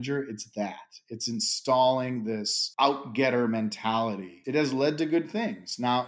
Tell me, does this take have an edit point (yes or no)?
yes